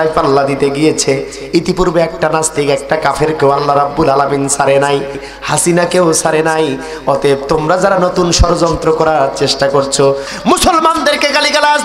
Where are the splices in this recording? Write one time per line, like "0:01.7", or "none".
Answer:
0:05.3
0:10.3

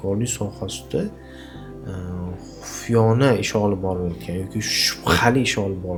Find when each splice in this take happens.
none

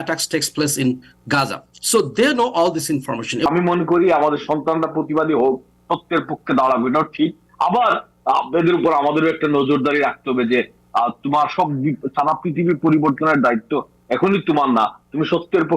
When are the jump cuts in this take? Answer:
0:03.5

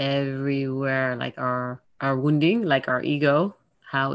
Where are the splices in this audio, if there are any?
0:01.8

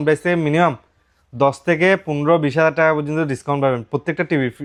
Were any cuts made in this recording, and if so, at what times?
none

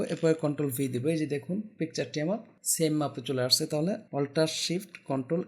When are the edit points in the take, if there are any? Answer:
0:02.6
0:04.0

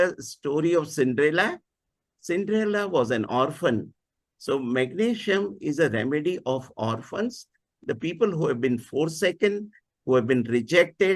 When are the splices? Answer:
none

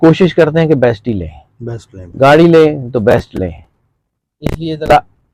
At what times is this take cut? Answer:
none

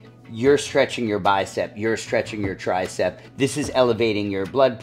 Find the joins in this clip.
0:03.2

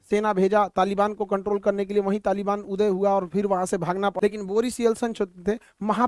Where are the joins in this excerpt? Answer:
0:04.1

